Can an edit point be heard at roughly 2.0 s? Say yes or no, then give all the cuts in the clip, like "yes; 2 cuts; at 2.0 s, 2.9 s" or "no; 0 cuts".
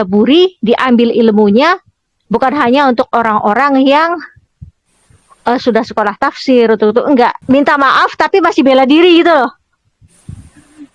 no; 1 cut; at 7.4 s